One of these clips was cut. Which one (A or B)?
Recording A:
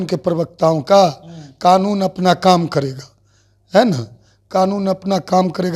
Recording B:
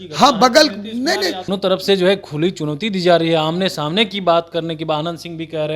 B